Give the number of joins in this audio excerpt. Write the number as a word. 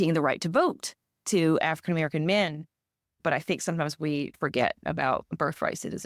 one